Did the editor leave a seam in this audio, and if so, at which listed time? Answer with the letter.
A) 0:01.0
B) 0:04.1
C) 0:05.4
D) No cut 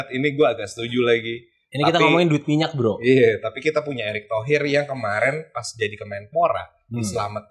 D